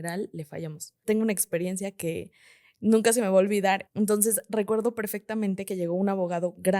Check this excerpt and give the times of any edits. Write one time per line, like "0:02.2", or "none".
0:01.0
0:03.9